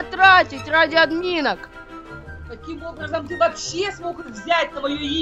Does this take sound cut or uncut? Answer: uncut